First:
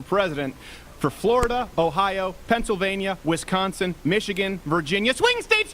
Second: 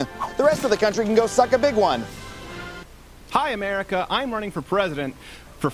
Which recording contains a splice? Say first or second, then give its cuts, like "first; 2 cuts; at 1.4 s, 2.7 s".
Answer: second; 1 cut; at 2.7 s